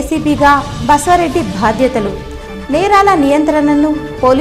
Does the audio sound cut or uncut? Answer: uncut